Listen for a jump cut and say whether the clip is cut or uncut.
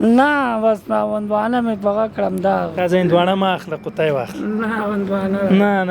cut